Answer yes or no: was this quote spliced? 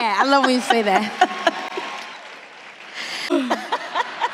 yes